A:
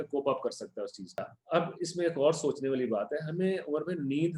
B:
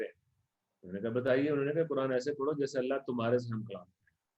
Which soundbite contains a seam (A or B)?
A